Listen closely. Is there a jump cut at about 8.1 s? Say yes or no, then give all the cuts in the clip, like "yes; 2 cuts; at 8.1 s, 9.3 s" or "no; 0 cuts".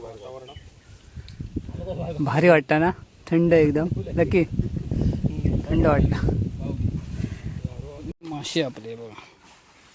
yes; 1 cut; at 8.1 s